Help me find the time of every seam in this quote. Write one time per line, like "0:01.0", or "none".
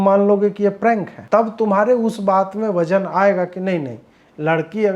0:01.1